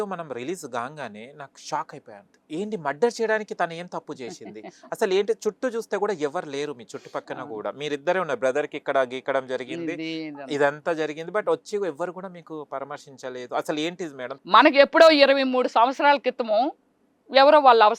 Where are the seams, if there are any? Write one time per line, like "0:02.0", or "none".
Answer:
0:02.3
0:14.3